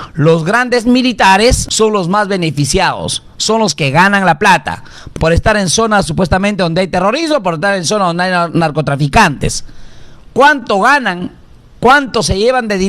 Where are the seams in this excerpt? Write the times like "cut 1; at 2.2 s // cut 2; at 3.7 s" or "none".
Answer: cut 1; at 1.6 s // cut 2; at 5.0 s